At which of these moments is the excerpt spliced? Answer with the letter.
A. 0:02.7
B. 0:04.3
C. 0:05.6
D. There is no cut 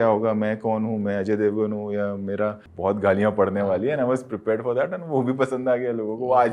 A